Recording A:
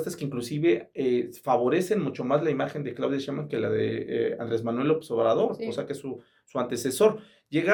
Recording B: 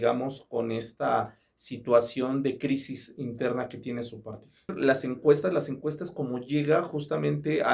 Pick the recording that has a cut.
B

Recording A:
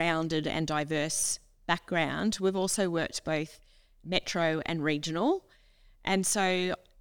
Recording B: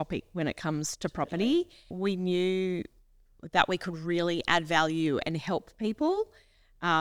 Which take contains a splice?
B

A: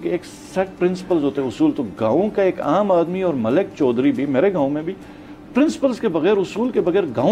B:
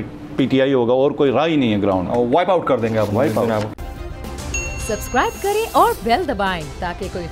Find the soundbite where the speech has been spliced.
B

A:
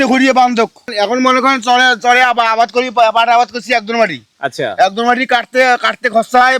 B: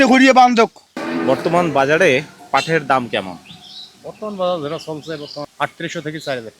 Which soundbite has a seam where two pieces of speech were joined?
B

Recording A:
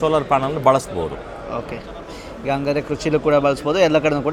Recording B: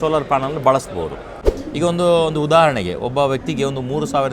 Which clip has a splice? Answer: B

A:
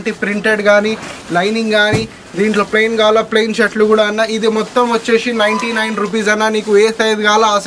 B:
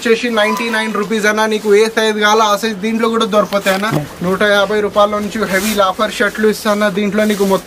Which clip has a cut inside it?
B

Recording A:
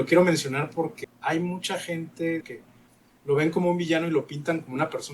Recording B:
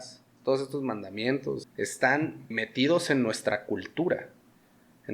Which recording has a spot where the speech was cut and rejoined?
A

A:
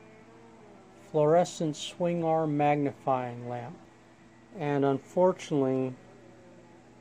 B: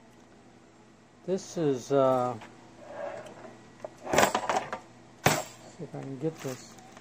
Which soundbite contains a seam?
A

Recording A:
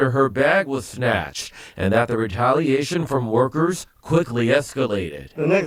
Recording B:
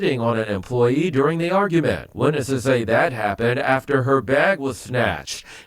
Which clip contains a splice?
B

